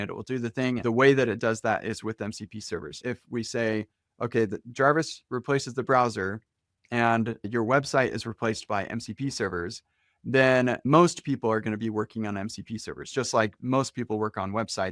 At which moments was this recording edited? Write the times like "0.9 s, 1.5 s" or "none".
0.8 s, 3.0 s, 7.5 s, 10.9 s